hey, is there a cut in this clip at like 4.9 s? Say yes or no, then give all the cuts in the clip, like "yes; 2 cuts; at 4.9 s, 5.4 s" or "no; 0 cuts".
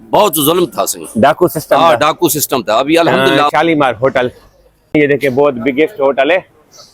yes; 2 cuts; at 3.5 s, 4.9 s